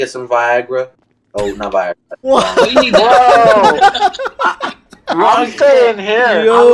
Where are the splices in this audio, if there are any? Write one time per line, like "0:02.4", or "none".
none